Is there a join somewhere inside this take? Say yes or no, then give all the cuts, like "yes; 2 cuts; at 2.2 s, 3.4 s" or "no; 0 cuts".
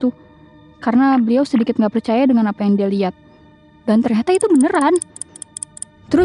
yes; 1 cut; at 1.3 s